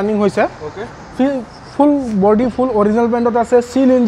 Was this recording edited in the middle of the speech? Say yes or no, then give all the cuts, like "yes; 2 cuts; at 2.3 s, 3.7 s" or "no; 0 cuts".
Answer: no; 0 cuts